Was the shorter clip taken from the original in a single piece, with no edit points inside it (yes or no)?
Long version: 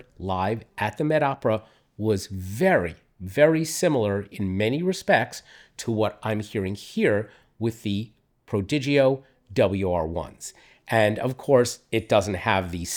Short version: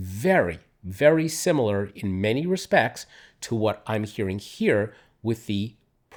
yes